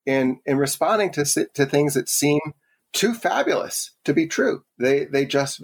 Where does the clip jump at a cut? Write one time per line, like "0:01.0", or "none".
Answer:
0:02.8